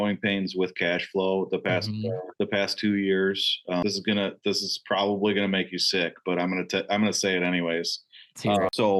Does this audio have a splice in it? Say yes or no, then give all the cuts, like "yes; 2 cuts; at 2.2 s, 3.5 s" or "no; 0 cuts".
no; 0 cuts